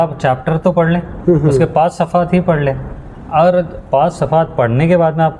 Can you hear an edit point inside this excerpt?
no; 0 cuts

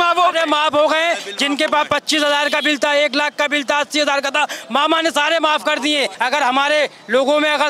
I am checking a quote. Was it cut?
yes; 1 cut; at 6.1 s

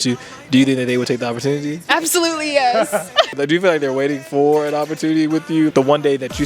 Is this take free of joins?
no; 3 cuts; at 1.8 s, 3.4 s, 5.7 s

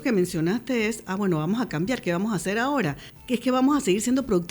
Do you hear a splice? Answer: yes; 1 cut; at 3.1 s

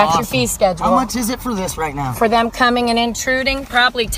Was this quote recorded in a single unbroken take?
yes; 0 cuts

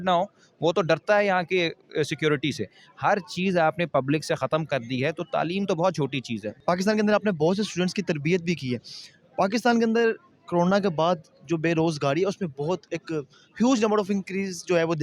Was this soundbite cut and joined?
no; 0 cuts

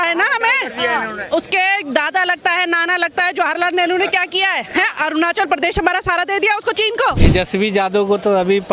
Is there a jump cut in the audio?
yes; 1 cut; at 7.2 s

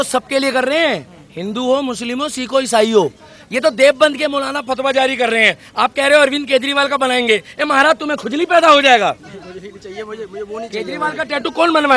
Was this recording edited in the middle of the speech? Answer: no; 0 cuts

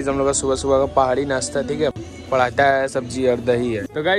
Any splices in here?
no; 0 cuts

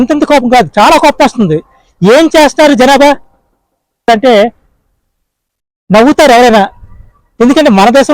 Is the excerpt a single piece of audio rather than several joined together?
no; 1 cut; at 4.1 s

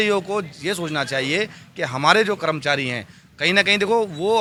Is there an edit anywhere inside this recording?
no; 0 cuts

